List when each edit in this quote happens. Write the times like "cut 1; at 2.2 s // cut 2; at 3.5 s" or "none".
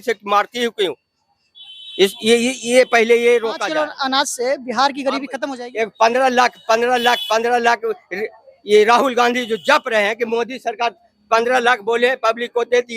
cut 1; at 3.6 s // cut 2; at 5.4 s